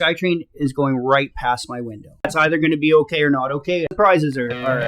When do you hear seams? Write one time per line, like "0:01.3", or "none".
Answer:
0:02.3
0:03.9